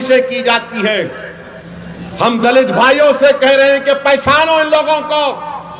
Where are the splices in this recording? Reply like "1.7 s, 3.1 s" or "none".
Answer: none